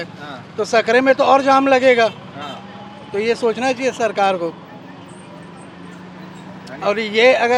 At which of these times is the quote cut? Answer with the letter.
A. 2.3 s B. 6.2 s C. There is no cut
C